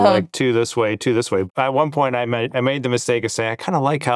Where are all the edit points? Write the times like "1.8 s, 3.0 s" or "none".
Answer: 1.5 s